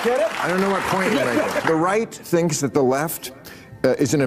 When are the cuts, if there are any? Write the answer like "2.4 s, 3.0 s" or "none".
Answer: 1.6 s